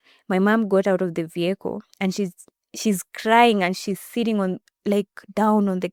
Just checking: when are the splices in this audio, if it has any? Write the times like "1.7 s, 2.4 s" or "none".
none